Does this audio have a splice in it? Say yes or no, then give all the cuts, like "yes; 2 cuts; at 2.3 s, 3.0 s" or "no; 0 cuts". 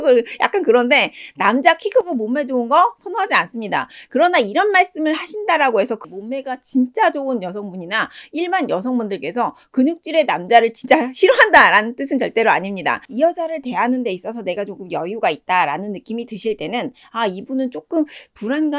yes; 2 cuts; at 6.0 s, 13.1 s